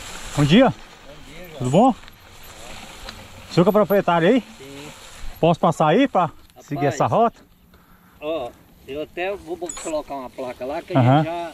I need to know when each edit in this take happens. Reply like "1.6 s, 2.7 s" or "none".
none